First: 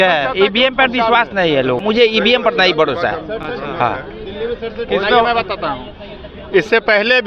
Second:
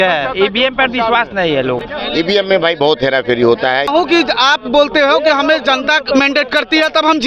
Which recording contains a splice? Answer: second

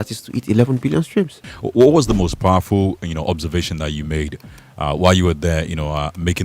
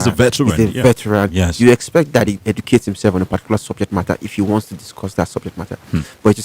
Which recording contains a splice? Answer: first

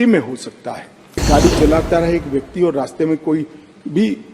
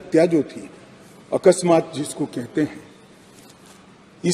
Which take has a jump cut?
first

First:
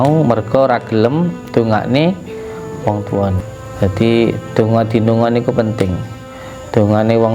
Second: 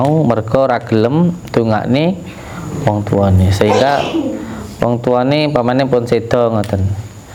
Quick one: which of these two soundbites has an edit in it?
first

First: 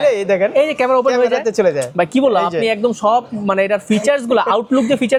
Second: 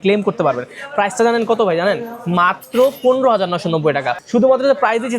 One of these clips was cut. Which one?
second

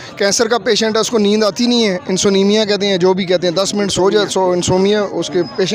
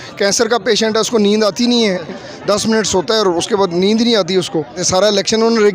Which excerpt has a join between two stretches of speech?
second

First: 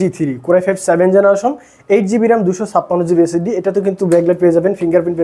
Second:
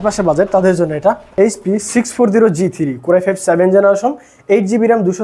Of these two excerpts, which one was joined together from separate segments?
second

